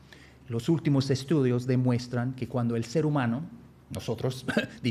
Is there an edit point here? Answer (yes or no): no